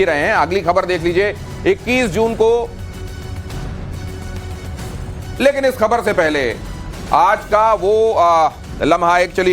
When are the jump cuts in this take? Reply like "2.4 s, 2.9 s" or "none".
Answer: 5.0 s